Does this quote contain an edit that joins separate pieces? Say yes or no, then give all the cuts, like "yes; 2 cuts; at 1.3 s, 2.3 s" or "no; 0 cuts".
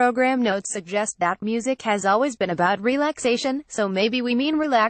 no; 0 cuts